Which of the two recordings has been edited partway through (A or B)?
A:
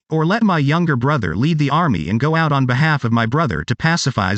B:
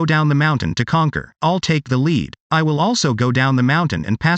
B